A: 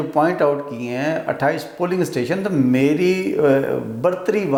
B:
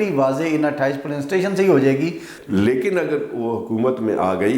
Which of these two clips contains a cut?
B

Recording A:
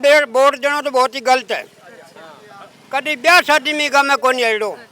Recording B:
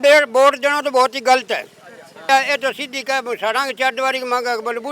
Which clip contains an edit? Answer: B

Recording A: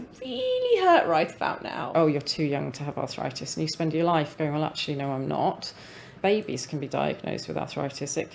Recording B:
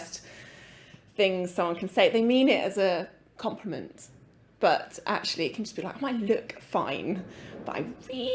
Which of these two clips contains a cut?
A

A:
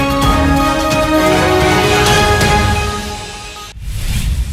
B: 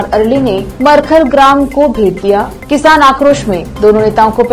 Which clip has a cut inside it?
A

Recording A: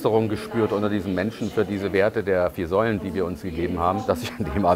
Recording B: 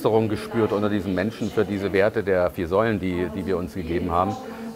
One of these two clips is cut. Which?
A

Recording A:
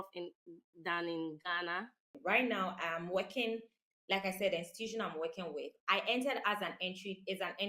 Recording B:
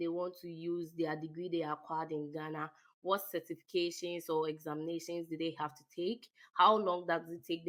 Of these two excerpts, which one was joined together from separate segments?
A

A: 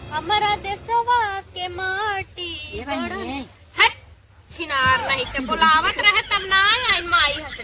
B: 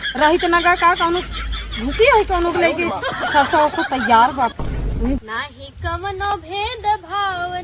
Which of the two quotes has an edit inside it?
B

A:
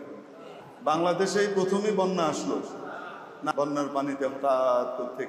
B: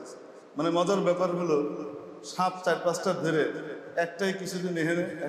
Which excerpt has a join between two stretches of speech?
A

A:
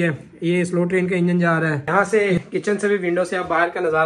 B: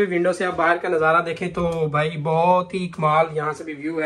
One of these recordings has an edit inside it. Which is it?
A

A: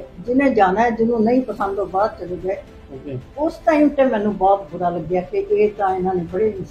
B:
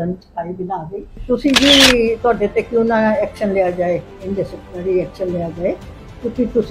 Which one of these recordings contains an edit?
B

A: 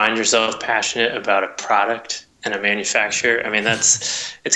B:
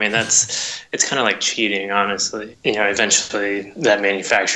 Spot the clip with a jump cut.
B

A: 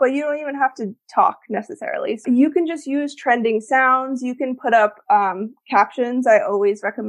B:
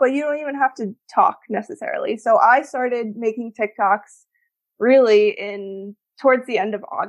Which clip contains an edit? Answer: A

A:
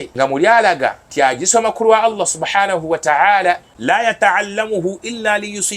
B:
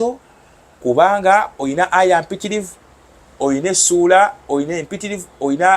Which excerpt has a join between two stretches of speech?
A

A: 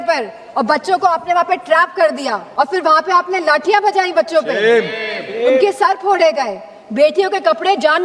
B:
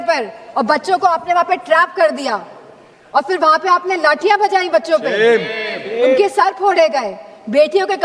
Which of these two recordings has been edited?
A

